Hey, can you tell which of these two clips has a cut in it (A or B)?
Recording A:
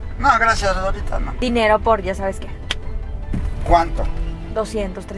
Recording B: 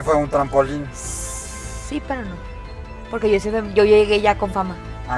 A